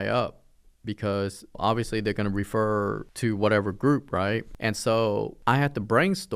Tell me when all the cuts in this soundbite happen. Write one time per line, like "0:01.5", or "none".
0:01.6
0:03.1
0:04.5
0:05.3